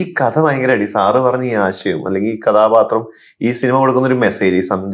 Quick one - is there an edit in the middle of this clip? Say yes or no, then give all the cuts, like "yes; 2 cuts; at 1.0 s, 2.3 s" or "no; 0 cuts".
no; 0 cuts